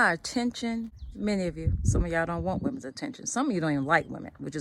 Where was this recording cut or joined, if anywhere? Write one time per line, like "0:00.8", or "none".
0:01.0